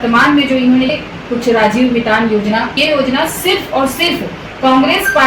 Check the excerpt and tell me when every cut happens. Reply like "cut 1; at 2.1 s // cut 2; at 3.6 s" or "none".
cut 1; at 0.9 s // cut 2; at 2.8 s